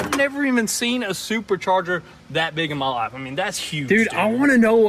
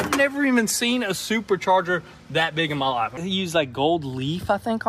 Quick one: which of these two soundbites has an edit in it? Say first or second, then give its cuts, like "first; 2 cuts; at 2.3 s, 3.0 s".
second; 1 cut; at 3.2 s